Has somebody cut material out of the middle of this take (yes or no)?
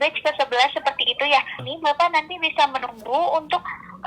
yes